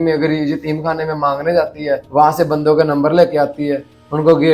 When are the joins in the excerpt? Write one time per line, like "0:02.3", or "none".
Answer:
0:02.0